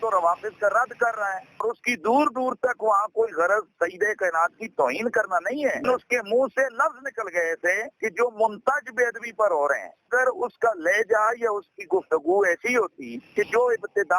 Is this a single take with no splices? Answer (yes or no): yes